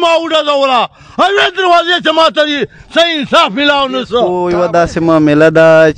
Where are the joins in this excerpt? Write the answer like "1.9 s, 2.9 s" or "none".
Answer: 4.4 s